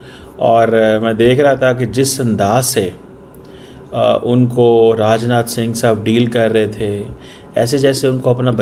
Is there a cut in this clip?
no; 0 cuts

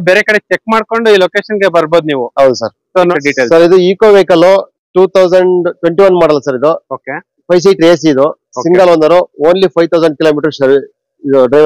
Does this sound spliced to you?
yes; 1 cut; at 3.2 s

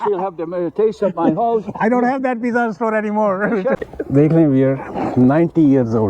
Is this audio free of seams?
no; 1 cut; at 3.8 s

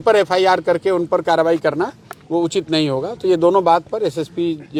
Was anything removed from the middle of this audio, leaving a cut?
no; 0 cuts

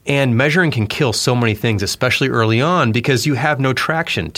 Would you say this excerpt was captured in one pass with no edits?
yes; 0 cuts

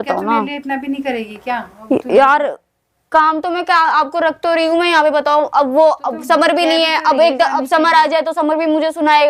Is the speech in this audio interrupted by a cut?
no; 0 cuts

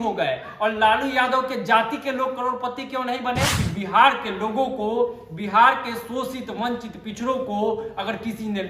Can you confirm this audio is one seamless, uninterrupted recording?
no; 1 cut; at 3.6 s

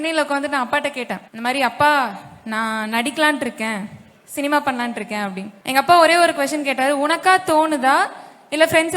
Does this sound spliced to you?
yes; 2 cuts; at 1.2 s, 5.5 s

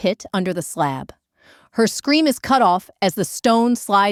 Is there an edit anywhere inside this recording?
no; 0 cuts

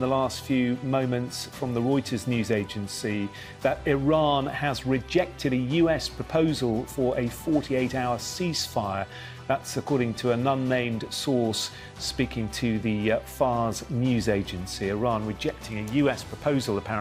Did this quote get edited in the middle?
no; 0 cuts

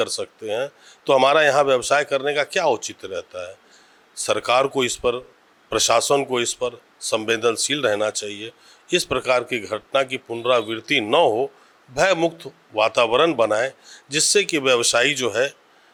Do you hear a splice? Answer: no; 0 cuts

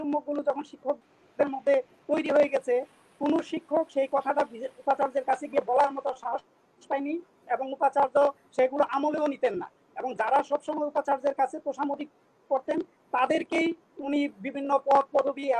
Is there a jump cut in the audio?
no; 0 cuts

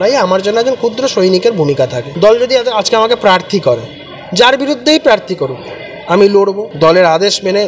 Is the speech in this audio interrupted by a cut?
yes; 2 cuts; at 2.0 s, 6.7 s

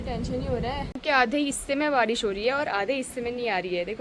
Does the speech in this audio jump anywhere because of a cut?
yes; 1 cut; at 0.9 s

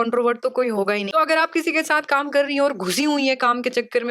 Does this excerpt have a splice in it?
yes; 1 cut; at 1.1 s

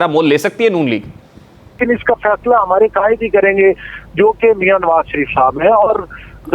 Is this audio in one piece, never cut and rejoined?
no; 1 cut; at 1.8 s

